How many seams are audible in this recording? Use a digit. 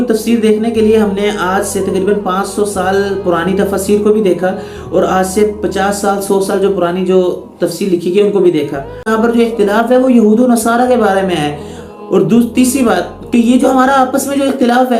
1